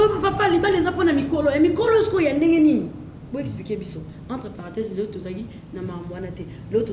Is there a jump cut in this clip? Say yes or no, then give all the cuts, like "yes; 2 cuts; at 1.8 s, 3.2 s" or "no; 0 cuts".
no; 0 cuts